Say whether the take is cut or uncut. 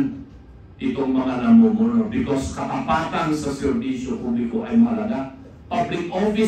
uncut